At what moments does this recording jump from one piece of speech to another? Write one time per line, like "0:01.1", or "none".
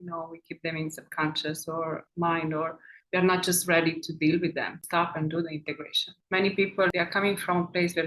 0:04.7
0:06.9